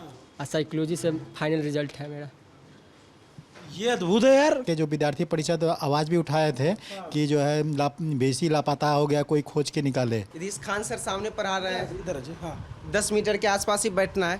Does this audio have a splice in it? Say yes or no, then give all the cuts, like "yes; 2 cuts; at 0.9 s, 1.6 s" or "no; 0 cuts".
yes; 2 cuts; at 4.6 s, 10.4 s